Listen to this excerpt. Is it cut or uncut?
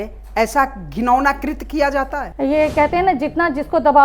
cut